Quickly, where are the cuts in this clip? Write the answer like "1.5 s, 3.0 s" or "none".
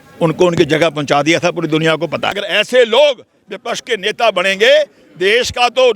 2.4 s

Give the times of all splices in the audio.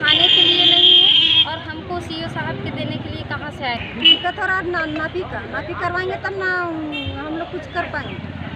3.8 s

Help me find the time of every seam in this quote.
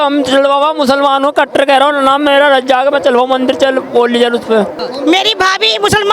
4.8 s

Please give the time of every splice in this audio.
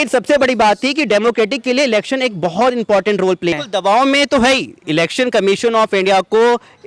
3.6 s

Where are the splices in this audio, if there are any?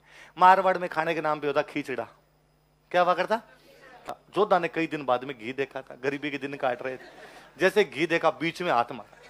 4.1 s

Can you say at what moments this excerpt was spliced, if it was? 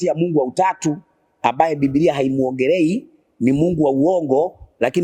none

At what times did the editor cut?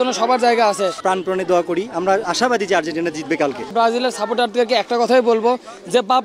1.0 s, 3.7 s

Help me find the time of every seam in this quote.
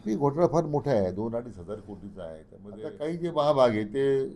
2.6 s

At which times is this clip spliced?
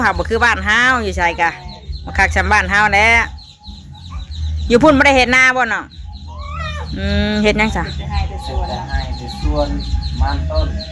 none

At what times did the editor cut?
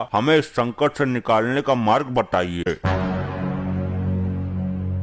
2.7 s

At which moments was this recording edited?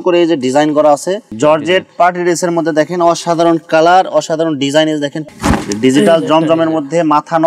1.2 s, 5.2 s

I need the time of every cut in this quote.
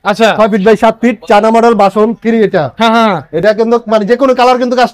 none

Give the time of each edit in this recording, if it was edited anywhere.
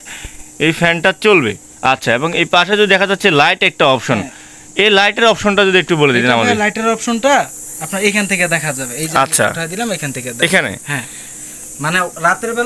none

